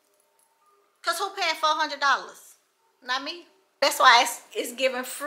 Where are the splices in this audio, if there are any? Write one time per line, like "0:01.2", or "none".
0:03.8